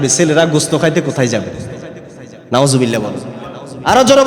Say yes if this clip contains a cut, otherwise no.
no